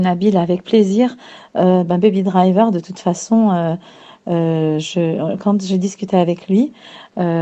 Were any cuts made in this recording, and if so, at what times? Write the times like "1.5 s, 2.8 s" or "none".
none

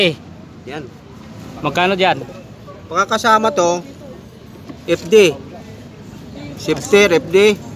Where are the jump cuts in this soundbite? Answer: none

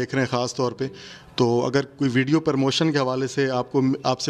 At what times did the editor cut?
none

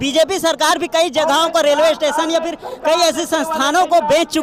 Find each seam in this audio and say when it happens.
none

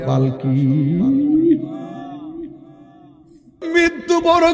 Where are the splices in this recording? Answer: 3.5 s

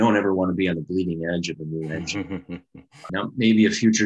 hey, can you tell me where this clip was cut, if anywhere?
3.0 s

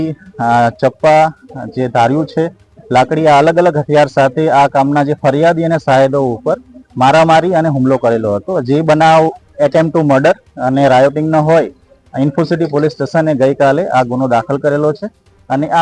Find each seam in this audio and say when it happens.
none

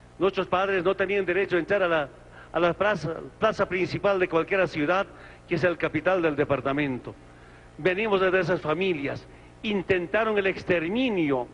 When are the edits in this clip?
none

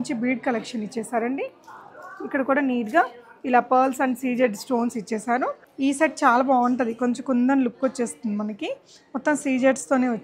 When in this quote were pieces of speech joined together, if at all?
5.6 s

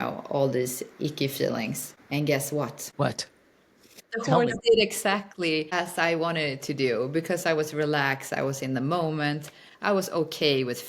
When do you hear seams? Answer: 1.9 s, 2.8 s, 4.0 s, 5.7 s

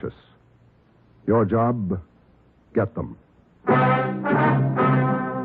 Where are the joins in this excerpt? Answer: 1.5 s

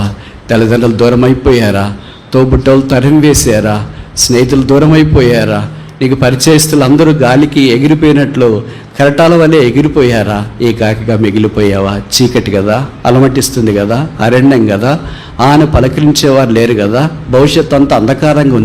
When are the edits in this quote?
none

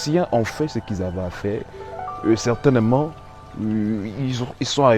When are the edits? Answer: none

